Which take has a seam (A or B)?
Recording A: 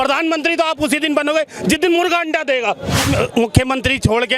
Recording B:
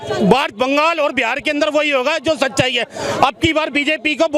A